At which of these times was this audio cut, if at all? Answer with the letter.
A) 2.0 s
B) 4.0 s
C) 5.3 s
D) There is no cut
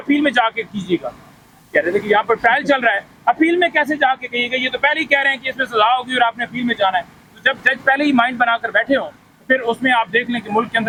D